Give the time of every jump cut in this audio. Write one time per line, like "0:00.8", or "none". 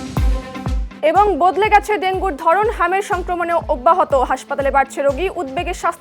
0:01.1